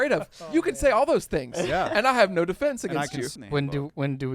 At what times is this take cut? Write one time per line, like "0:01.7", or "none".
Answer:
0:03.3